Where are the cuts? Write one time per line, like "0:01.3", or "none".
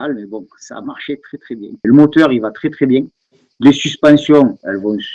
0:01.7

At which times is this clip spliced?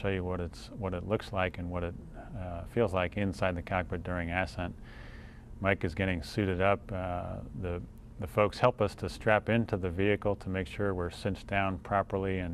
0:03.5

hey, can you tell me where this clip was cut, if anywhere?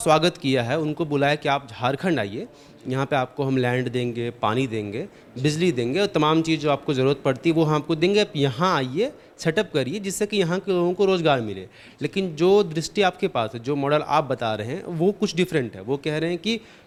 none

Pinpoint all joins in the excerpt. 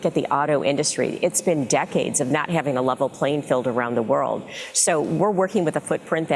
none

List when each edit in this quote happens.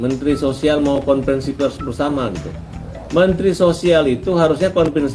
none

